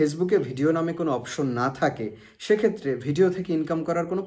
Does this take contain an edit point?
no; 0 cuts

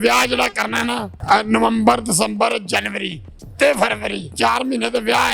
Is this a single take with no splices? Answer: no; 1 cut; at 4.3 s

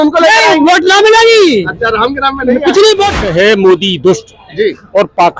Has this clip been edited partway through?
yes; 1 cut; at 3.2 s

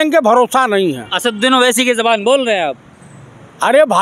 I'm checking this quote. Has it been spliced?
no; 0 cuts

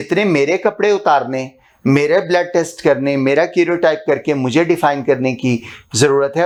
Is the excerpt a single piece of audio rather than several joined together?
yes; 0 cuts

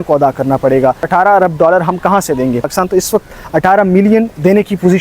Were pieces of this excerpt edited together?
yes; 2 cuts; at 1.1 s, 2.7 s

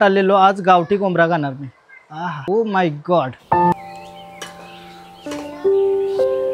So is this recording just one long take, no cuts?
no; 3 cuts; at 2.4 s, 3.7 s, 5.3 s

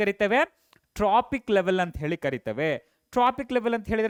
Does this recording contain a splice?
no; 0 cuts

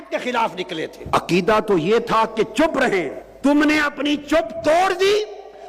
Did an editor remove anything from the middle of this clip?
yes; 2 cuts; at 1.0 s, 3.2 s

